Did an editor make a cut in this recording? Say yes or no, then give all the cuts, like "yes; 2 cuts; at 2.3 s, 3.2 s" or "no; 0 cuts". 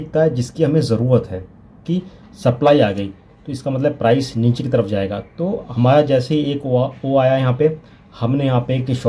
yes; 1 cut; at 1.8 s